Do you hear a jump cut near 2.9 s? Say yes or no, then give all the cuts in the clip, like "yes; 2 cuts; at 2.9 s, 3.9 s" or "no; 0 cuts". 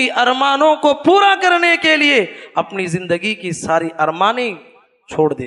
no; 0 cuts